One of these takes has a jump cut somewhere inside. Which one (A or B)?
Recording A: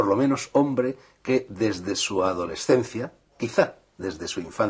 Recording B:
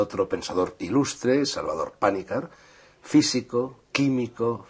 A